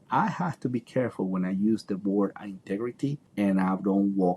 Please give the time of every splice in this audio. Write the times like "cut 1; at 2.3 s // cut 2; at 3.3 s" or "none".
cut 1; at 3.2 s